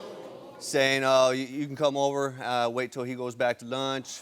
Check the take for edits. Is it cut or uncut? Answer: uncut